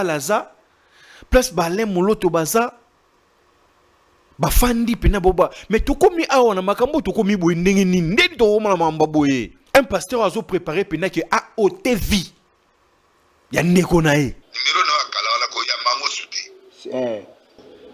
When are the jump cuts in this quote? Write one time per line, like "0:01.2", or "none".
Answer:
0:14.4